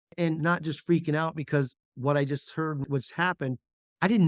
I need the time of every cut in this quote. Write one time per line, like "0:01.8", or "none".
0:02.8